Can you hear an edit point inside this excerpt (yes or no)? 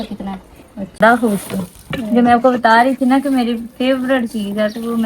yes